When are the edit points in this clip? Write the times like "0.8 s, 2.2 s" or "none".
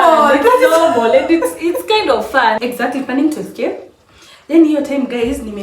2.6 s